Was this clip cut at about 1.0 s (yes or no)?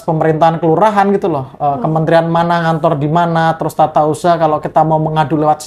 no